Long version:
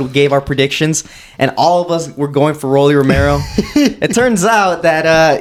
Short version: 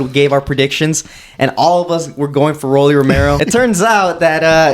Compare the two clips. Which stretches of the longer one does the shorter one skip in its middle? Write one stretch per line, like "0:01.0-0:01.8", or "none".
0:03.4-0:04.0